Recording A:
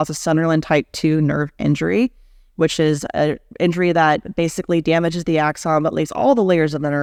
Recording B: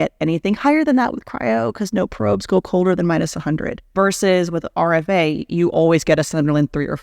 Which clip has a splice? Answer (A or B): B